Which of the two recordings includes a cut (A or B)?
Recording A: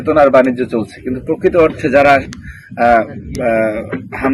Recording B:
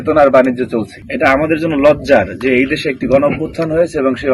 B